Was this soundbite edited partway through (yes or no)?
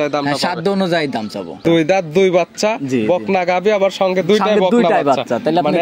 yes